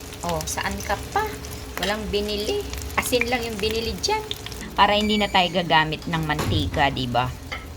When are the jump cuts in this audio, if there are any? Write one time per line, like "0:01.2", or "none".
0:01.6
0:02.8
0:04.6